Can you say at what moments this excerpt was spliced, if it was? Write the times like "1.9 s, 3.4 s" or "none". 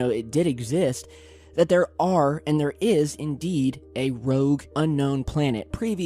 4.6 s